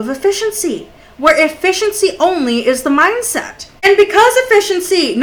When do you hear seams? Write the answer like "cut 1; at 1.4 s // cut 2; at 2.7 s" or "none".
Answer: none